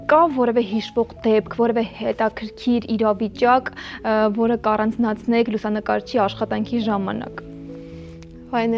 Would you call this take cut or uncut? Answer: uncut